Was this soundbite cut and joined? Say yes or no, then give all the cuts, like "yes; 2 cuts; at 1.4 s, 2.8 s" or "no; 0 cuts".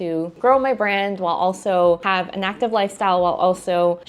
no; 0 cuts